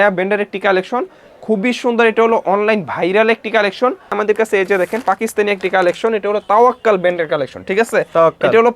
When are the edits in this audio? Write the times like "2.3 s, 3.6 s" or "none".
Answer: 4.1 s